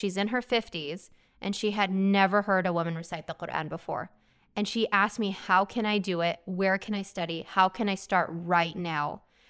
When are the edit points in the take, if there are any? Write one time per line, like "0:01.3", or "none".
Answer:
none